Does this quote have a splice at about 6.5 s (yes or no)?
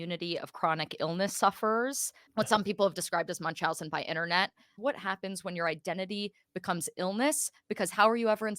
no